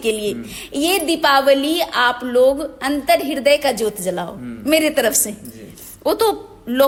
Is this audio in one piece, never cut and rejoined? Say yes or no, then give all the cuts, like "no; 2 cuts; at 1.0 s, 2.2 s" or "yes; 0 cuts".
yes; 0 cuts